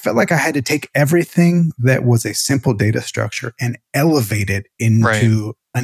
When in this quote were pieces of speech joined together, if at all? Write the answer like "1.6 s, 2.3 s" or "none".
none

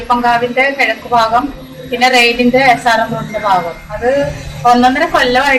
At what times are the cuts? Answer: none

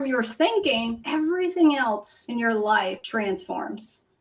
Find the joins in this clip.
1.0 s, 2.2 s, 3.0 s

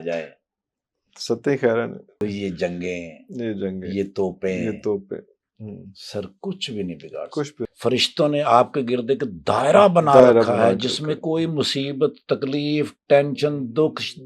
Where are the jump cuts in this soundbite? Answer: 2.2 s, 7.6 s

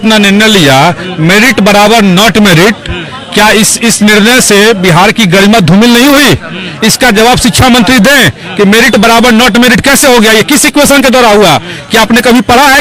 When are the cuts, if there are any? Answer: none

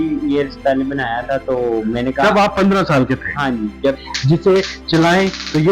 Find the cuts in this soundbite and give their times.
4.1 s

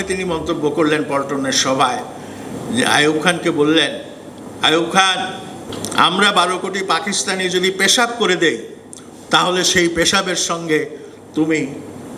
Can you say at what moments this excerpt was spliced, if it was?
none

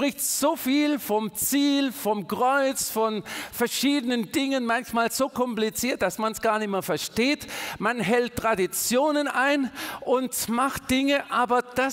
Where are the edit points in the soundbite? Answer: none

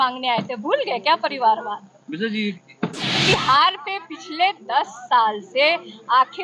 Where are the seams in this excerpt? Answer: 3.1 s

